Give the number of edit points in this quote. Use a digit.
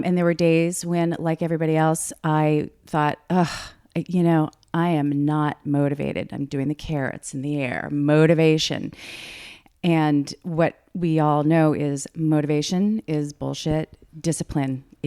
1